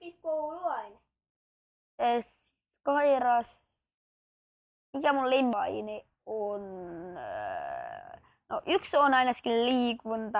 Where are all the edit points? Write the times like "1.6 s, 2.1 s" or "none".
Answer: 5.5 s